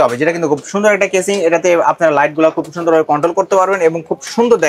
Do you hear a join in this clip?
no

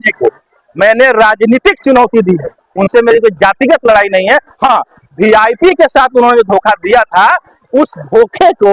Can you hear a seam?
no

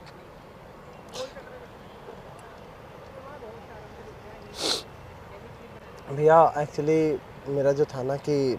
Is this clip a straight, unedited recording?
yes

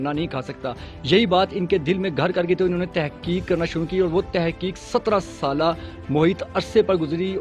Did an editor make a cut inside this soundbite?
no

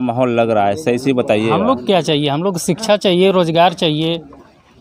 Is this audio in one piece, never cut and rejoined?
yes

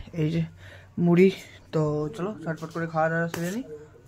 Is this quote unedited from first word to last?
yes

